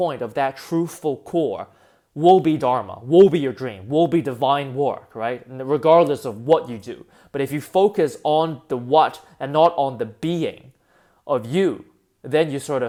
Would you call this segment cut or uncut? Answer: uncut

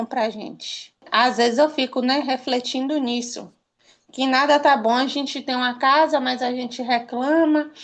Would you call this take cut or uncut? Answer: cut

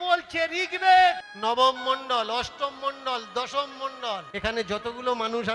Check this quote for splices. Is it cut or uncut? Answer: cut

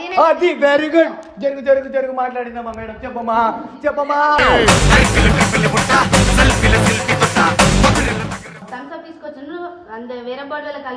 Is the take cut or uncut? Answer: cut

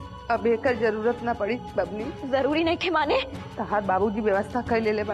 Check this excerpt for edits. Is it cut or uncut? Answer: cut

